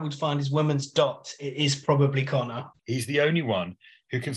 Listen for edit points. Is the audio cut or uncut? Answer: cut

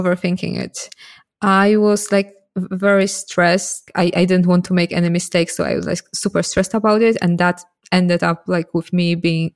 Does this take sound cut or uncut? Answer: cut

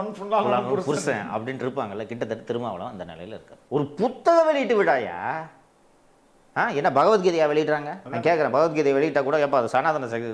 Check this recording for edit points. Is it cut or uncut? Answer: cut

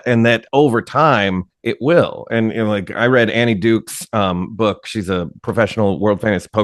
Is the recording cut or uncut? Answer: cut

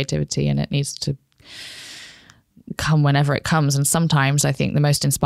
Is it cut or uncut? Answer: uncut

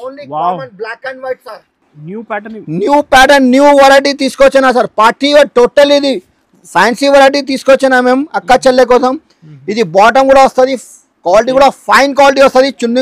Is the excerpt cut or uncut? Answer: uncut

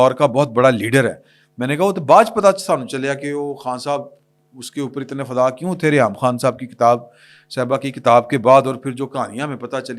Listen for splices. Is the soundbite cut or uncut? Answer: uncut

